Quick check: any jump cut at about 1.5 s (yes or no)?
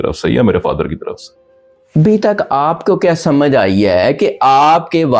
no